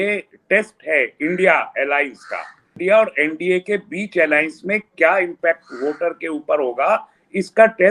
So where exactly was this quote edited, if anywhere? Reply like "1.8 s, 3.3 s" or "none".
2.8 s